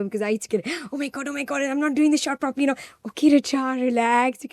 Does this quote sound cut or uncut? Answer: uncut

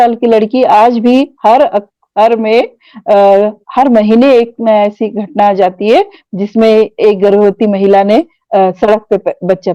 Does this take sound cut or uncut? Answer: uncut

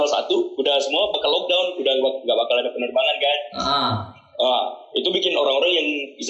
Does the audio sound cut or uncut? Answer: uncut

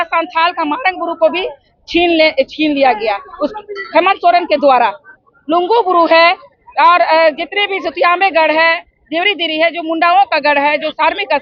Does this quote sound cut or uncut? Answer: uncut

